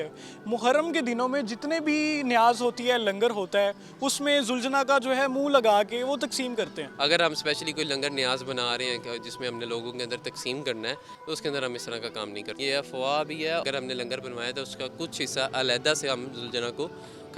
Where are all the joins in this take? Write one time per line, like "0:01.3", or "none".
0:06.8
0:11.1
0:12.6
0:13.6